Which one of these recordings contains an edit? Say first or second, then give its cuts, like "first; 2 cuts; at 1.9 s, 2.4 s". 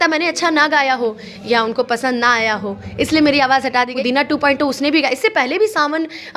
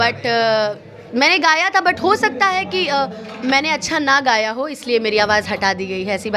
first; 1 cut; at 4.0 s